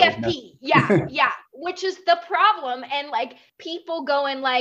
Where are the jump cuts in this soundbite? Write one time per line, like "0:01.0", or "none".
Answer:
0:03.5